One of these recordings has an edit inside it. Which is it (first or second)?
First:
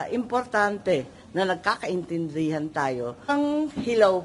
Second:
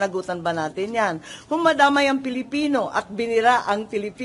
first